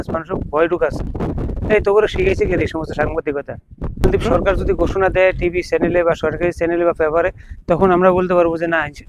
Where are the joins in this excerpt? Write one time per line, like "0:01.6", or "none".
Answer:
0:04.0